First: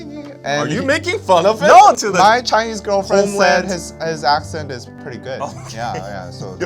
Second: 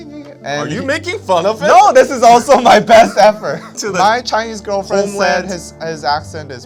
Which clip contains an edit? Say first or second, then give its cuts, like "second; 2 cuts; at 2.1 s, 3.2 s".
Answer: first; 2 cuts; at 1.9 s, 4.9 s